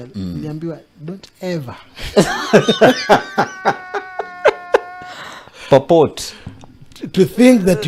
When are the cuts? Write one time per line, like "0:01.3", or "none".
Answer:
none

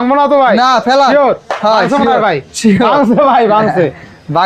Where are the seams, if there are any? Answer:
none

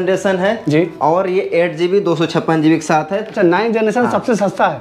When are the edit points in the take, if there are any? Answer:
0:03.3

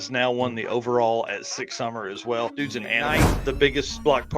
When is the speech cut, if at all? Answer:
0:03.3

